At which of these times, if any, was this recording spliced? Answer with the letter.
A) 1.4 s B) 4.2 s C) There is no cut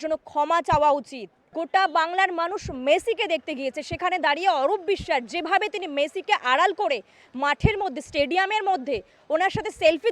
A